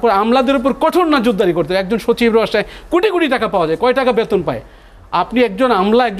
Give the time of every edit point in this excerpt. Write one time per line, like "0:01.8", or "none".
none